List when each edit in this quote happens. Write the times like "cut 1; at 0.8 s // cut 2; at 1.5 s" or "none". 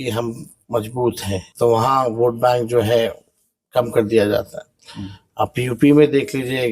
cut 1; at 1.5 s